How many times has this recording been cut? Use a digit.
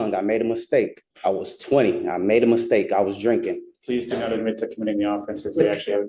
2